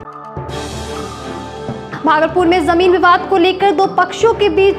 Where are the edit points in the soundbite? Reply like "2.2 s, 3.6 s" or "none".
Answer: none